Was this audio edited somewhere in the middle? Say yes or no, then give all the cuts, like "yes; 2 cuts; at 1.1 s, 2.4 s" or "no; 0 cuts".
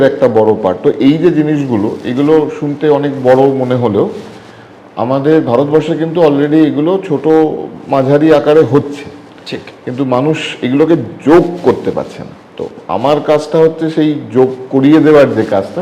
no; 0 cuts